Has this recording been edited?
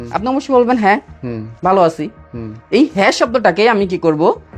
no; 0 cuts

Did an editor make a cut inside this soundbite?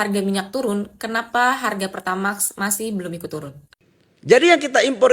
yes; 1 cut; at 3.6 s

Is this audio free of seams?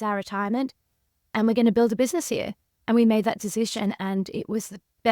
yes; 0 cuts

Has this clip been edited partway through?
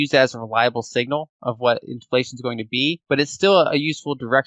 yes; 1 cut; at 3.0 s

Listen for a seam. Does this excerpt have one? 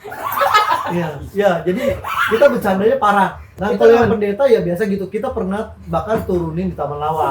yes; 1 cut; at 3.5 s

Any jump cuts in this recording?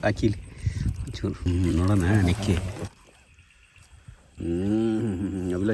no; 0 cuts

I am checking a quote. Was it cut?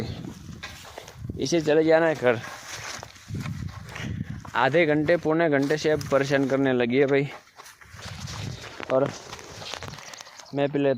yes; 1 cut; at 8.0 s

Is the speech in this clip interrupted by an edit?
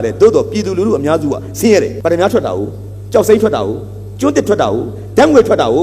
yes; 1 cut; at 2.0 s

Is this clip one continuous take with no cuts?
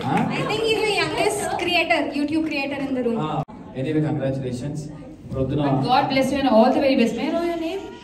no; 1 cut; at 3.6 s

